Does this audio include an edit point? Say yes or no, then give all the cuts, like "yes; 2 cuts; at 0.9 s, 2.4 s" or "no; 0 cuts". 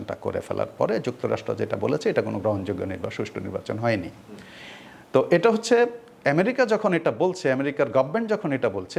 no; 0 cuts